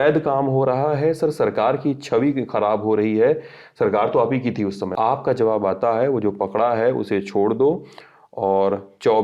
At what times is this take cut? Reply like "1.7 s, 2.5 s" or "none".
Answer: 4.8 s